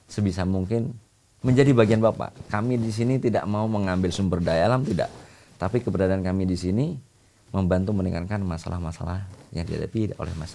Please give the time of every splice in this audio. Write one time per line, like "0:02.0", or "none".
none